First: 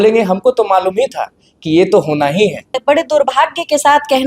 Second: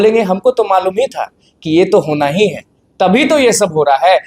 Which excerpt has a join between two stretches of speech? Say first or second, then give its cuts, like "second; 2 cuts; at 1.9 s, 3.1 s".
first; 1 cut; at 2.8 s